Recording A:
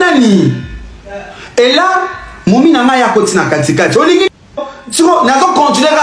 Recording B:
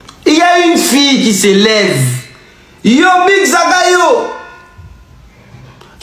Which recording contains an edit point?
A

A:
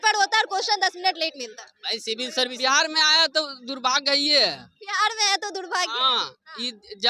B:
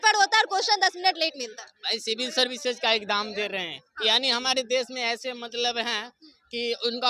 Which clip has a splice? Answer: A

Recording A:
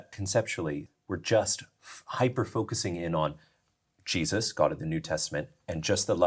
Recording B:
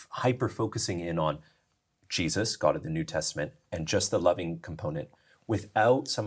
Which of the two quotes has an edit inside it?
A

